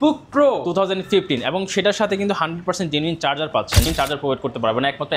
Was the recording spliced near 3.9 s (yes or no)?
yes